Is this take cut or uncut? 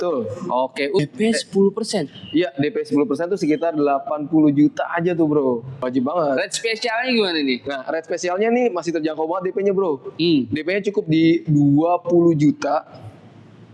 cut